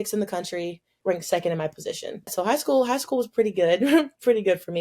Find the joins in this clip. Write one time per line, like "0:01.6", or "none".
0:00.9
0:02.3